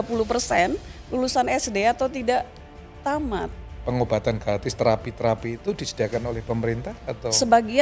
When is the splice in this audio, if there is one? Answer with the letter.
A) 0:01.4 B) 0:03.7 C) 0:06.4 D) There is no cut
B